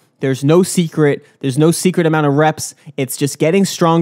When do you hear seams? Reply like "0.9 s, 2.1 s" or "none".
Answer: none